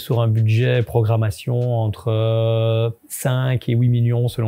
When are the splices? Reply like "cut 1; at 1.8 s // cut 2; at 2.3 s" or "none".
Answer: cut 1; at 3.1 s